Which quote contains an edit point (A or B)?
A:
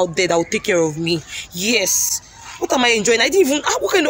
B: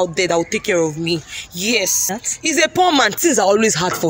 B